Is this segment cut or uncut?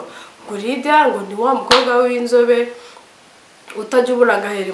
uncut